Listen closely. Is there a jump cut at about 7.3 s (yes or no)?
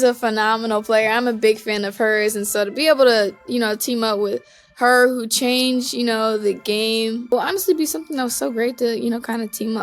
yes